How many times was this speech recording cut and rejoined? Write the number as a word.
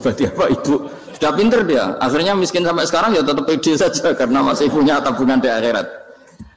zero